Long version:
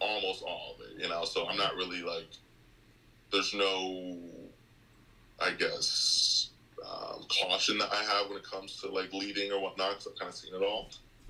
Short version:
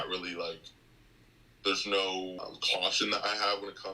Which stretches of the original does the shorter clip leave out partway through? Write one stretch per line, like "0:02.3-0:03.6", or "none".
0:04.0-0:07.0

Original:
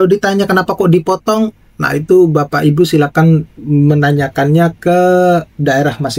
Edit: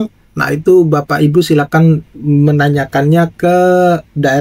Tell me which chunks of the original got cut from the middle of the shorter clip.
none

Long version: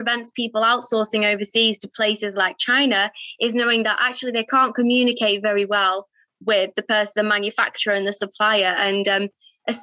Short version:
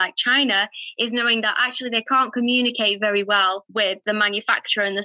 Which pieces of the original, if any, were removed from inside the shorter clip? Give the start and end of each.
0:06.4-0:07.1

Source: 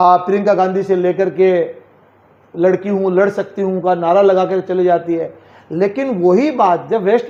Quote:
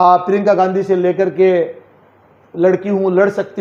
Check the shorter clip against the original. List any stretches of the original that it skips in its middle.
none

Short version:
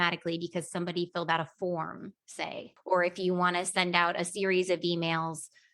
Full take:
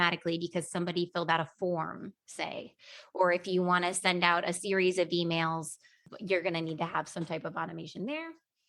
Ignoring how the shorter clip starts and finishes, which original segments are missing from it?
0:02.7-0:03.0

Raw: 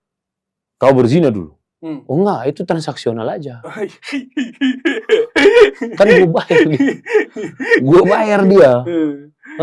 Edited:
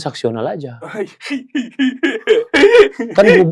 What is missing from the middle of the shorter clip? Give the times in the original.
none

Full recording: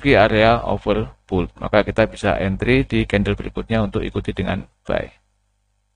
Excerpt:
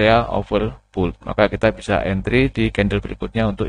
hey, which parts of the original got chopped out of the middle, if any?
none

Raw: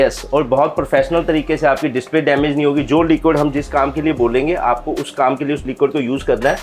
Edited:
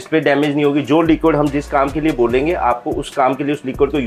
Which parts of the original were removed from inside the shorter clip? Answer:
none

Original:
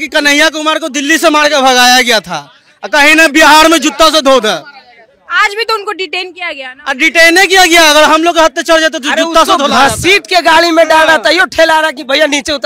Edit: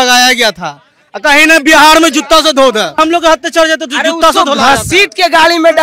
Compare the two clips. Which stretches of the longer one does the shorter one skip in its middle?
0:04.7-0:08.1

